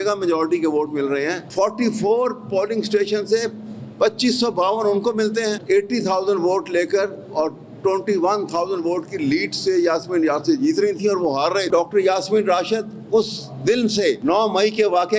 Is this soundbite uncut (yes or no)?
no